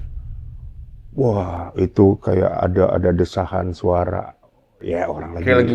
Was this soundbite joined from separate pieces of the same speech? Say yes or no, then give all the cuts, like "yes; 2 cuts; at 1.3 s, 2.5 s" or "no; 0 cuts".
yes; 1 cut; at 1.0 s